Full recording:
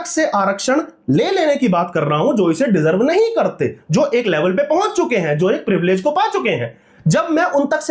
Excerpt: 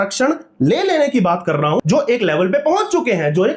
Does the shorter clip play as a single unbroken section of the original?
no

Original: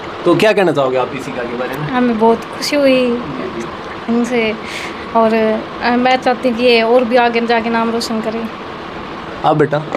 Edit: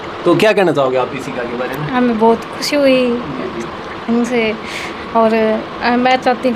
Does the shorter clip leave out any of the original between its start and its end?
no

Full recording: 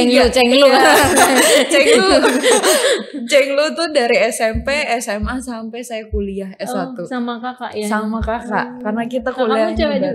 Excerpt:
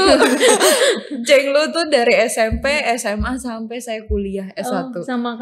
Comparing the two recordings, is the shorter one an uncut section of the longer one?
yes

